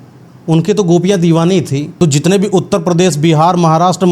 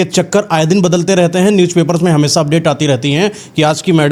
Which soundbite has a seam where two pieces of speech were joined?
first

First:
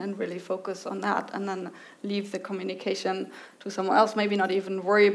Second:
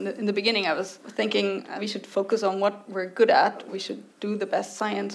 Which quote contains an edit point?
second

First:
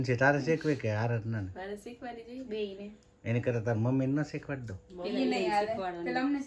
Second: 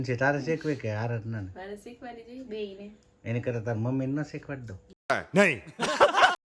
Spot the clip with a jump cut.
first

